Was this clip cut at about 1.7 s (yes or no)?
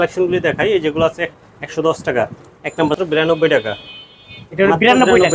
no